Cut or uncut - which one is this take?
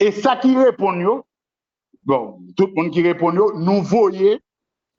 uncut